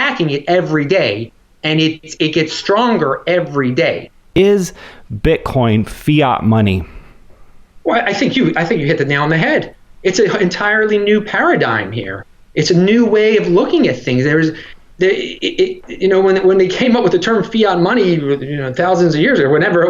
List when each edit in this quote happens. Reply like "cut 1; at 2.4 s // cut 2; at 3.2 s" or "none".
cut 1; at 4.4 s